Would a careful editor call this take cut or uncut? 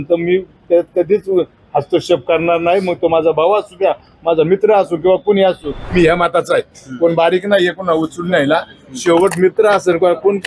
cut